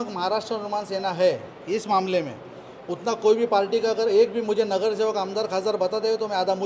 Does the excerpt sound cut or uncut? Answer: uncut